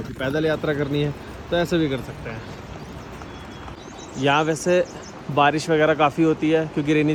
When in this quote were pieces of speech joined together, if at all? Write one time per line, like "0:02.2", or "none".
none